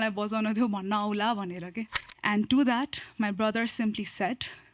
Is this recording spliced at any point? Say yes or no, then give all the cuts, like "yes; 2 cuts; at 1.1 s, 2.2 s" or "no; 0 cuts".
yes; 1 cut; at 2.0 s